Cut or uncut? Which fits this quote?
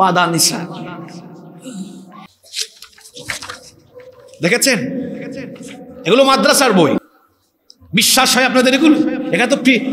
cut